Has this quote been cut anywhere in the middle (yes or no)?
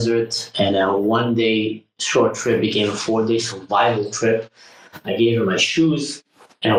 no